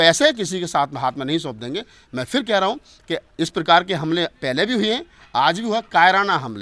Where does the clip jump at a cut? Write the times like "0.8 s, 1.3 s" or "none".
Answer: none